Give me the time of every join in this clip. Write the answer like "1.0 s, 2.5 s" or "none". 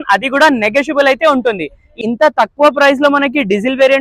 2.1 s